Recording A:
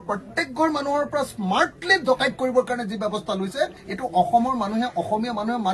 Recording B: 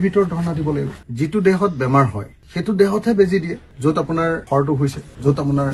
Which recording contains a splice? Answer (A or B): B